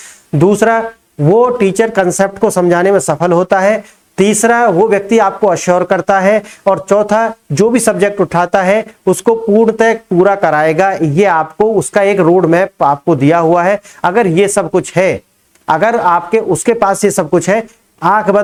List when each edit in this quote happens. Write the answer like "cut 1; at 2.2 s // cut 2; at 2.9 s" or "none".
none